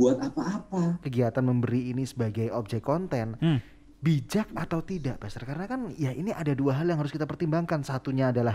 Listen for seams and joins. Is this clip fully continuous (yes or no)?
no